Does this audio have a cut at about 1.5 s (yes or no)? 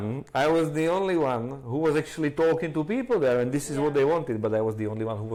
no